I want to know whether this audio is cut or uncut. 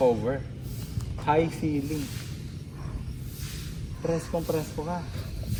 uncut